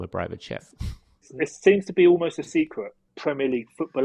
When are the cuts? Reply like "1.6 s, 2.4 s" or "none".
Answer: 1.3 s, 3.1 s